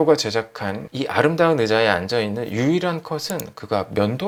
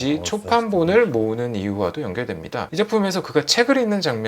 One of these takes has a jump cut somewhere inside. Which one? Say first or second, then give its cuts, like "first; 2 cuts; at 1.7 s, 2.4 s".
second; 1 cut; at 2.6 s